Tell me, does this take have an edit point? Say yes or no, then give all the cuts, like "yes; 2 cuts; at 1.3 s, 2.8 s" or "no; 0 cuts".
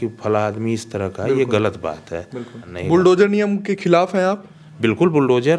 yes; 1 cut; at 2.7 s